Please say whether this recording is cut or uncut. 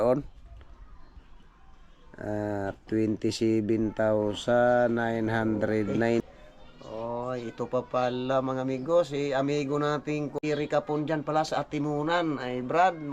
cut